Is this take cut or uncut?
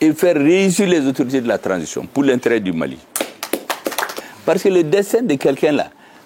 cut